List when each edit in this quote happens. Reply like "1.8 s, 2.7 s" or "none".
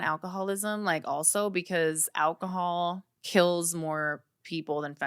3.1 s